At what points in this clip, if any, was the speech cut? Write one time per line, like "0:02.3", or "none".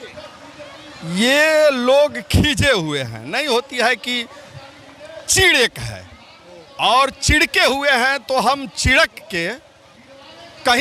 none